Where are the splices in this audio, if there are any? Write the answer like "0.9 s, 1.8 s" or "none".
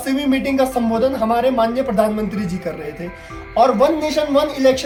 none